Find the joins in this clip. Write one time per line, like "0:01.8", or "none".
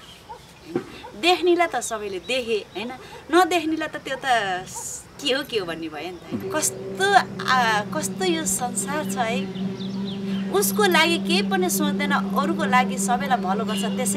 0:06.4